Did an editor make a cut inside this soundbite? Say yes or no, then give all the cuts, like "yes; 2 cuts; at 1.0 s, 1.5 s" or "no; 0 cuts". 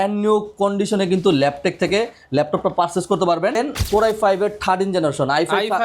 yes; 1 cut; at 3.6 s